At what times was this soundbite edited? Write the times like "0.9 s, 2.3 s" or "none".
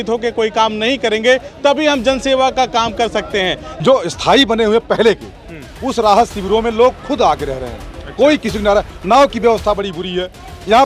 3.7 s